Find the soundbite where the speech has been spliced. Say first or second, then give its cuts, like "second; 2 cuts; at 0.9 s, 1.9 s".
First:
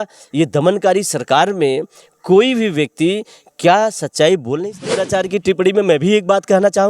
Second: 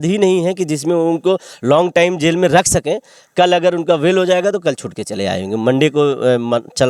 first; 1 cut; at 5.0 s